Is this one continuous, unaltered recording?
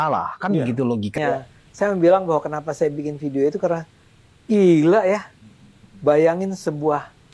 no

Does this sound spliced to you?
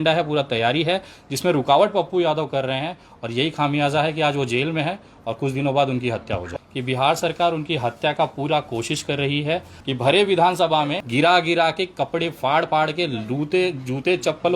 yes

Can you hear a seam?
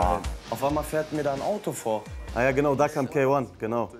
yes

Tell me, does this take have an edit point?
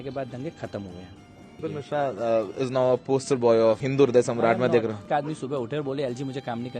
yes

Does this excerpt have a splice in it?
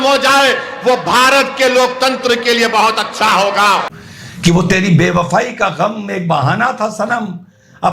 yes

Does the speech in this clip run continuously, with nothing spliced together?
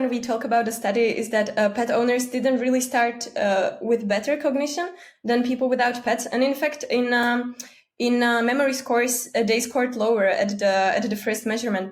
yes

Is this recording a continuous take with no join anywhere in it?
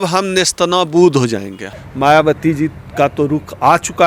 no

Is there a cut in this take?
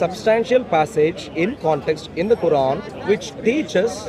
yes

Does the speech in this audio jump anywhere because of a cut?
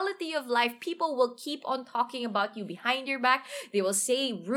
no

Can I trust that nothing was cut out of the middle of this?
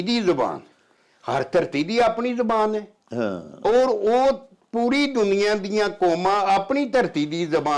yes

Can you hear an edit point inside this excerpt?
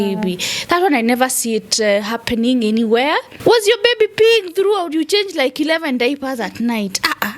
yes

